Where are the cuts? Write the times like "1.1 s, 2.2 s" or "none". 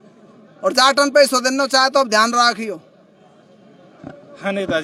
none